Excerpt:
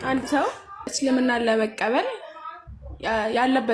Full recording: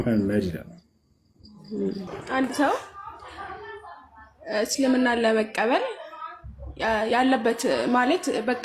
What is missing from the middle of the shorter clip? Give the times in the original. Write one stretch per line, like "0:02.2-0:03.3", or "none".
0:03.2-0:04.7